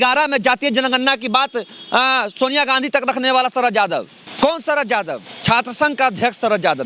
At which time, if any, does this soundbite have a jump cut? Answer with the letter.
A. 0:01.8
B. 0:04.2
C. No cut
B